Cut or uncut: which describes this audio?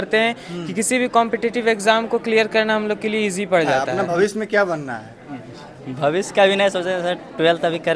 cut